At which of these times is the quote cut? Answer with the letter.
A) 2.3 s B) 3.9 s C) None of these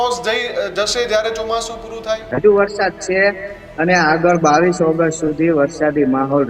A